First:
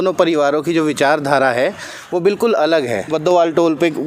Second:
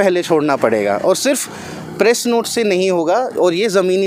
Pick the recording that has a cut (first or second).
first